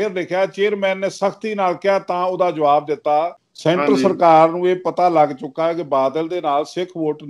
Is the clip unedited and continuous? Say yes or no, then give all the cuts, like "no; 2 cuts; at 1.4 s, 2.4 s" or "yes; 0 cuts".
no; 1 cut; at 3.4 s